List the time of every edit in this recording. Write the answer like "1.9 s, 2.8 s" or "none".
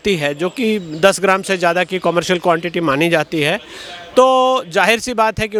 none

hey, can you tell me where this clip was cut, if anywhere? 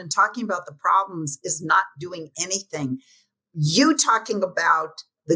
none

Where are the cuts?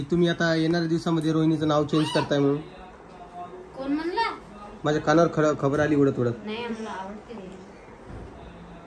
none

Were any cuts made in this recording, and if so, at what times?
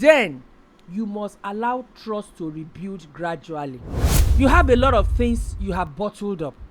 4.2 s

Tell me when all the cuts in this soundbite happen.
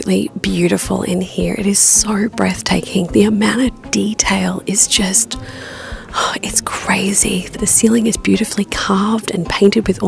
none

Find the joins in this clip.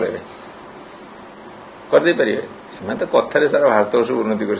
none

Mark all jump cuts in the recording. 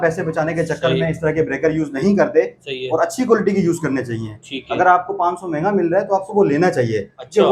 none

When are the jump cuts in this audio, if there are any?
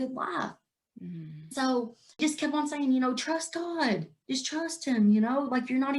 2.1 s

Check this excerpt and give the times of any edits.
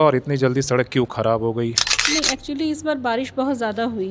1.9 s

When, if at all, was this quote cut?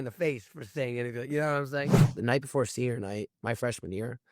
2.0 s

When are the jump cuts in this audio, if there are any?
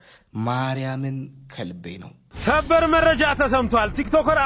2.3 s

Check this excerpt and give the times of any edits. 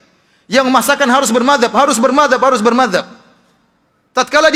none

